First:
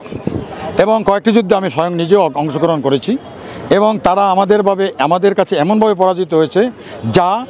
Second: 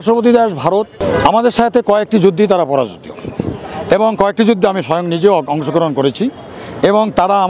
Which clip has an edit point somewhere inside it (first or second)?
second